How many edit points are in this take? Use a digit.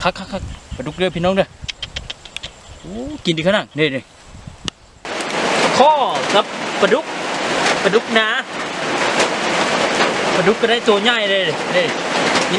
1